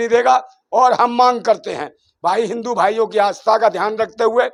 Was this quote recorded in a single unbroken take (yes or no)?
yes